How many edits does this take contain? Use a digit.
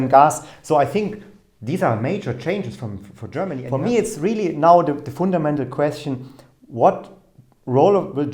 1